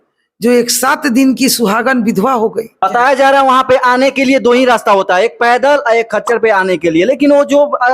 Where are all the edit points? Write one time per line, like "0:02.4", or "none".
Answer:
0:02.8